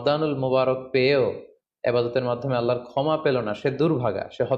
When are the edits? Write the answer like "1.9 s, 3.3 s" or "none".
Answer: none